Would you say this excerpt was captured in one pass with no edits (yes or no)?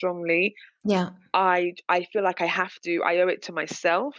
yes